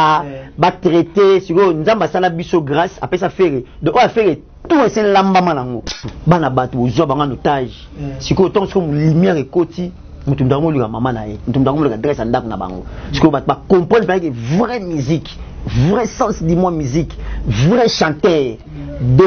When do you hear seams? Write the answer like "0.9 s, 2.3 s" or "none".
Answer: 5.9 s